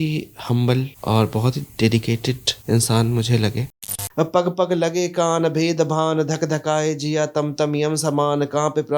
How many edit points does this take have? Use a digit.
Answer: 3